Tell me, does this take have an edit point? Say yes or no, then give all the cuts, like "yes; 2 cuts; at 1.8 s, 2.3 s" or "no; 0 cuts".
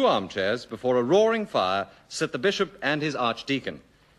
no; 0 cuts